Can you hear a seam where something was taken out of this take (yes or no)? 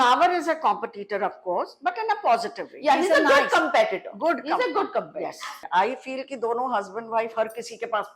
yes